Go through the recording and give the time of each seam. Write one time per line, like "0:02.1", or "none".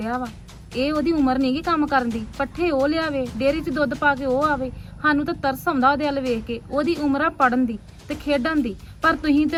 none